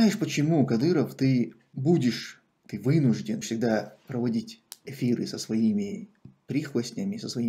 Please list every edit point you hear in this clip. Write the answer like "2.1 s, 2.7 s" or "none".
1.7 s, 3.5 s